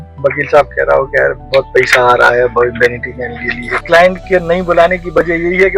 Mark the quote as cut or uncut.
cut